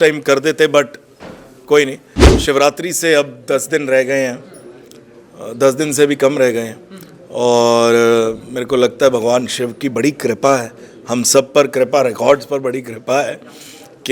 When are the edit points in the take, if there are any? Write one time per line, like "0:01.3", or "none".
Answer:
0:02.2